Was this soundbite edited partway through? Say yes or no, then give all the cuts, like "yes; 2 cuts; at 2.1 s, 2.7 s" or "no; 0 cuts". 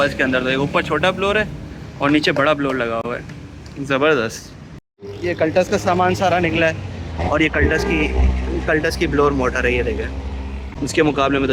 no; 0 cuts